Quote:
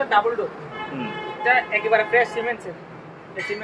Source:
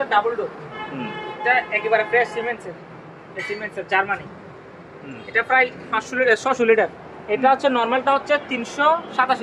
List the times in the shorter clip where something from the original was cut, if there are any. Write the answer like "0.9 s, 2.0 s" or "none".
none